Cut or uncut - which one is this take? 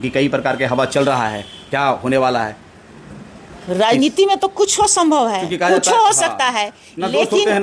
uncut